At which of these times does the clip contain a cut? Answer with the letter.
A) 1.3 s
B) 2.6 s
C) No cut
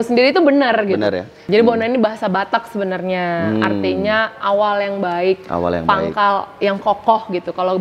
A